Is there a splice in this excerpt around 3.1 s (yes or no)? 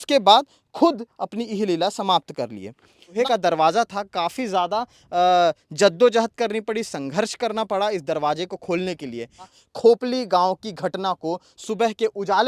yes